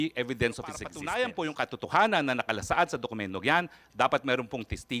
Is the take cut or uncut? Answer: cut